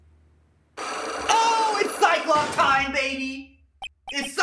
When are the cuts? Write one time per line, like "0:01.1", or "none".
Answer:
none